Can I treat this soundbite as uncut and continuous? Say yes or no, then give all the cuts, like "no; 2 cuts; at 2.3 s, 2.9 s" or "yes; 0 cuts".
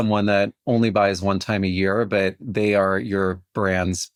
yes; 0 cuts